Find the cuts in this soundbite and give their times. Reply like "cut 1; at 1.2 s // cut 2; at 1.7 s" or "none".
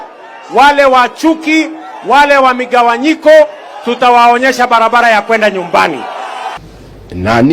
cut 1; at 6.6 s